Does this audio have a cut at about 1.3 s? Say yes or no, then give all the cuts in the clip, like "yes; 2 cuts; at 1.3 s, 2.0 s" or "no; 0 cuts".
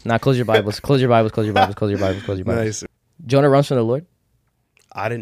no; 1 cut; at 2.8 s